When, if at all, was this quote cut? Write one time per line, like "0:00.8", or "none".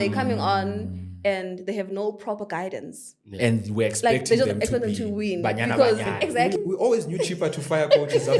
0:06.5